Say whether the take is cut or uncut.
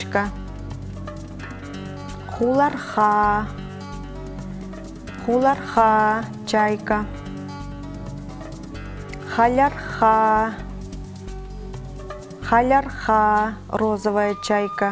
uncut